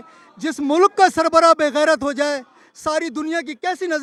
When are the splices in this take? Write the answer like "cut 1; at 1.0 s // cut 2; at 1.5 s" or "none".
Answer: none